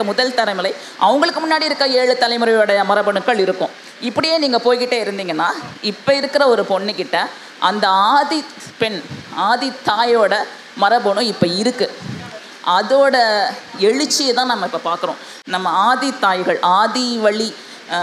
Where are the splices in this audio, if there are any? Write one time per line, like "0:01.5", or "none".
0:15.3